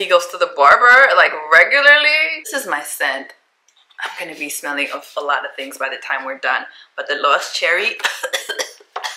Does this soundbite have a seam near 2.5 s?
yes; 1 cut; at 2.5 s

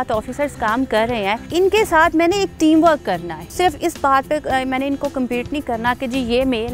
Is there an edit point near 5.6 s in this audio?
no; 2 cuts; at 1.4 s, 3.5 s

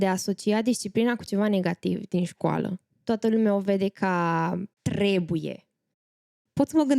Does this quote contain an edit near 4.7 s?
yes; 3 cuts; at 2.9 s, 4.7 s, 6.1 s

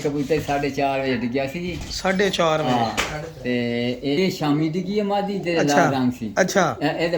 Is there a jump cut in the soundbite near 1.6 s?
no; 1 cut; at 4.2 s

